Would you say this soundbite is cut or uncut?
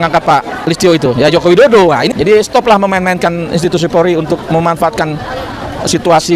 cut